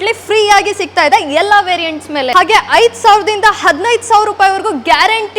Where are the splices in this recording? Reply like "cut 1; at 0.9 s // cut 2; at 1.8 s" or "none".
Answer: cut 1; at 2.3 s